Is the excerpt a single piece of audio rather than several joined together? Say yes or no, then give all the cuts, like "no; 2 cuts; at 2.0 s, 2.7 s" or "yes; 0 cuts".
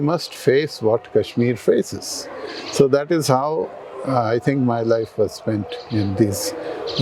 yes; 0 cuts